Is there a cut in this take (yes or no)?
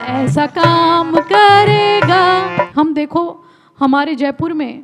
yes